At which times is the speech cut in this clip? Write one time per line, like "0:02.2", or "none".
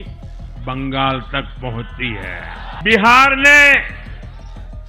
0:02.8